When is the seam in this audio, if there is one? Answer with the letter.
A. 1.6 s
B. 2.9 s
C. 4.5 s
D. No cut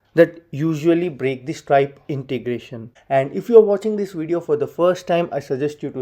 B